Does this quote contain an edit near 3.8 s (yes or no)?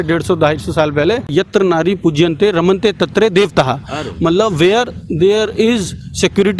no